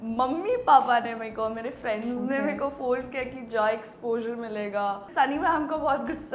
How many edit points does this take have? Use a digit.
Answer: 1